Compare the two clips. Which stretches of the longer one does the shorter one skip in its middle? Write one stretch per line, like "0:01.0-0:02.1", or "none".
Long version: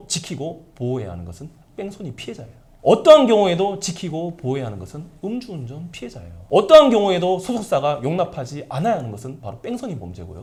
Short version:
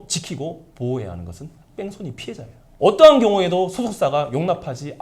0:02.6-0:06.3